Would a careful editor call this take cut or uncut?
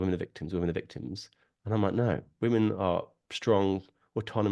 uncut